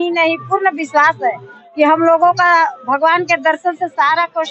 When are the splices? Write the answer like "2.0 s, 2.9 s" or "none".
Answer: none

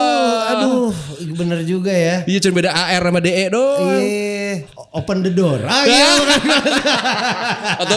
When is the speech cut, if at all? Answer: 4.7 s

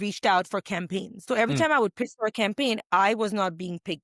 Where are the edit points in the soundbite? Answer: 1.1 s

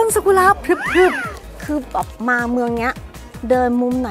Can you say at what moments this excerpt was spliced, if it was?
1.3 s

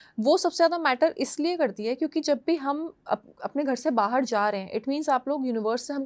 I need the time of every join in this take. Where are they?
none

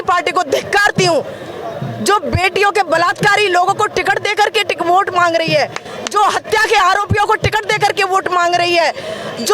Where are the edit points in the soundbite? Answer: none

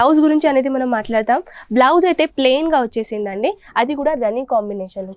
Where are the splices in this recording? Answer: none

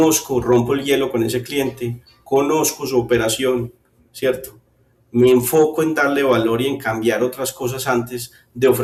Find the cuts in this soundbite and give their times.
none

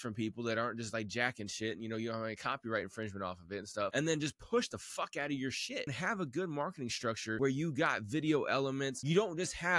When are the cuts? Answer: 3.9 s, 5.9 s, 7.4 s, 9.0 s

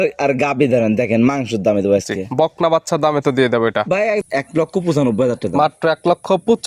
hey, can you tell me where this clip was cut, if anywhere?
4.2 s

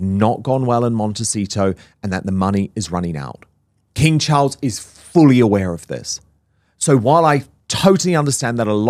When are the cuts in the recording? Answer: none

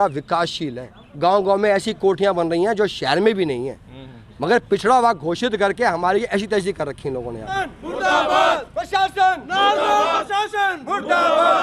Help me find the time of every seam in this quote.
7.6 s

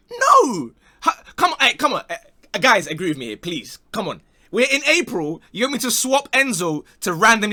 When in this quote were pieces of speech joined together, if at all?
none

